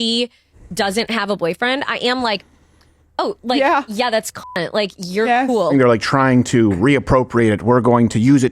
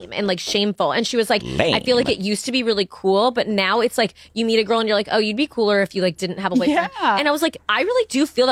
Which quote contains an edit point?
first; 1 cut; at 5.7 s

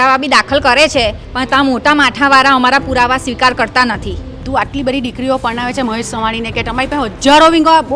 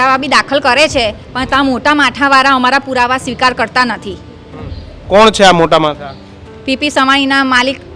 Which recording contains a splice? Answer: first; 1 cut; at 4.4 s

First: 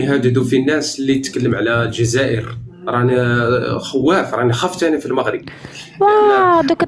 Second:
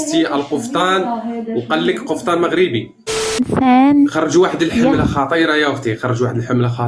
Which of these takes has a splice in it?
second; 1 cut; at 3.4 s

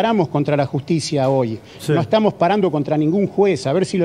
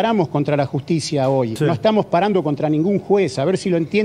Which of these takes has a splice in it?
second; 1 cut; at 1.5 s

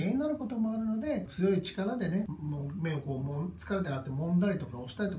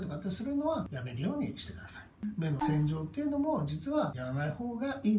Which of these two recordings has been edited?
second; 1 cut; at 2.1 s

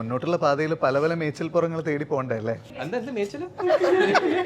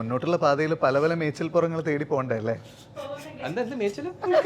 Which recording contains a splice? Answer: first; 1 cut; at 2.7 s

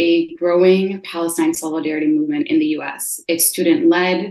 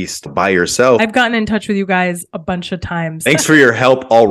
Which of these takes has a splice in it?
second; 2 cuts; at 1.0 s, 3.3 s

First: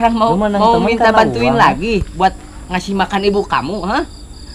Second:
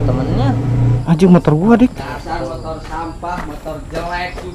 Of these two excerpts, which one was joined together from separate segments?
second; 1 cut; at 1.0 s

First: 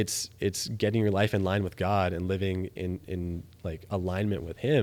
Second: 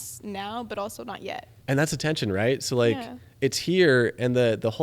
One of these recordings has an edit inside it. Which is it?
second; 1 cut; at 1.5 s

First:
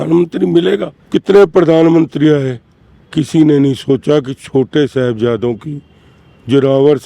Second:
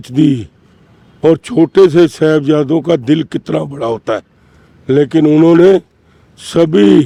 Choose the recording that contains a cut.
first; 1 cut; at 1.0 s

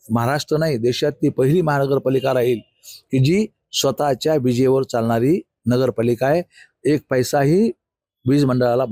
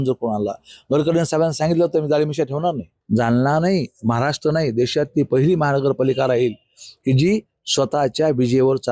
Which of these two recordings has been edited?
second; 1 cut; at 2.9 s

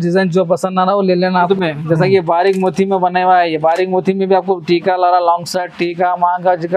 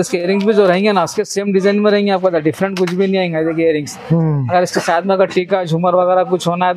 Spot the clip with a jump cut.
first; 1 cut; at 1.5 s

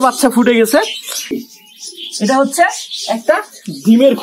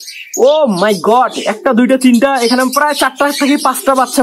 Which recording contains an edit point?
first; 1 cut; at 1.4 s

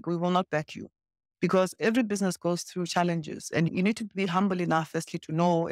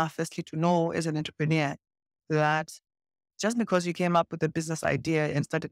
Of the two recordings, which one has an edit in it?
first; 1 cut; at 3.7 s

